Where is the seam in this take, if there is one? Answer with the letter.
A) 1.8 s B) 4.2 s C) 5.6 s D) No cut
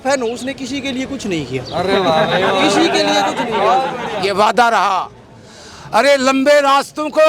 B